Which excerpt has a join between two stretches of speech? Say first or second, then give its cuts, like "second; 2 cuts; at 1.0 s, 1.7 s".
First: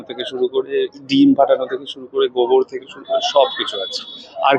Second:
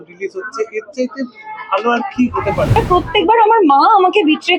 second; 1 cut; at 2.8 s